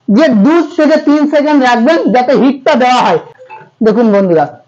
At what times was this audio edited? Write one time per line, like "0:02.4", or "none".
0:03.3